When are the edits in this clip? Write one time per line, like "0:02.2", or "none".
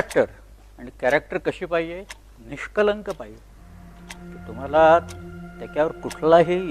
none

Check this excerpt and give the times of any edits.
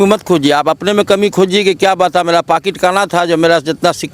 none

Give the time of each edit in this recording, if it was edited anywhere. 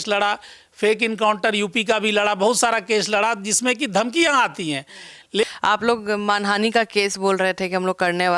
0:05.4

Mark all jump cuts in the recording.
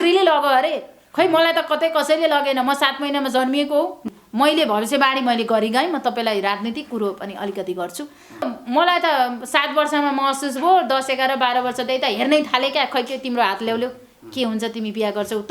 0:04.0
0:08.5

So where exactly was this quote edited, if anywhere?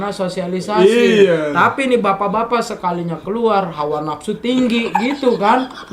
none

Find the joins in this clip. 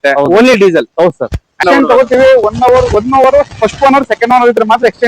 0:01.6

